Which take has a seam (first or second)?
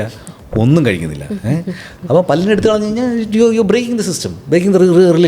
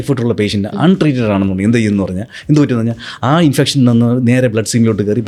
first